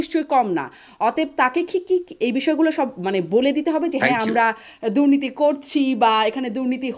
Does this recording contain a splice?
no; 0 cuts

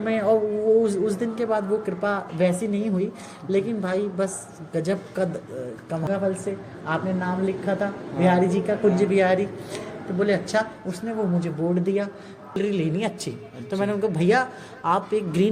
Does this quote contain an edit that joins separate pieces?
yes; 2 cuts; at 6.1 s, 12.6 s

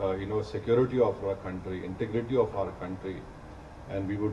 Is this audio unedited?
yes; 0 cuts

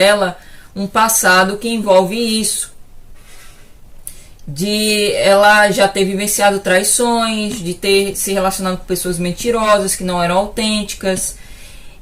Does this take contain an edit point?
no; 0 cuts

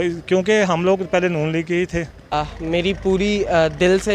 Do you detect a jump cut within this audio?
yes; 1 cut; at 2.3 s

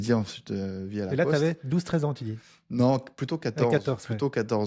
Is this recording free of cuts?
yes; 0 cuts

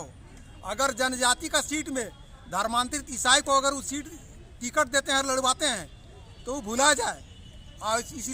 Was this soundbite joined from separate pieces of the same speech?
no; 0 cuts

